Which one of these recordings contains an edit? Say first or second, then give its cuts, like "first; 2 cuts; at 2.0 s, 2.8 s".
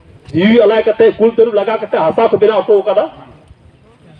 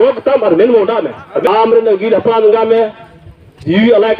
second; 1 cut; at 1.5 s